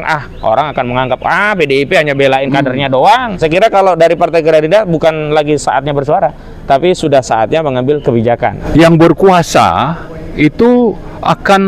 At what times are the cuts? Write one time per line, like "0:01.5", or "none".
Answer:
0:03.4
0:08.6